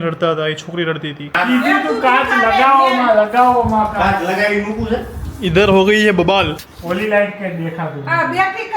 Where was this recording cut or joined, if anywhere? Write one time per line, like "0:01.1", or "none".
0:01.3
0:06.7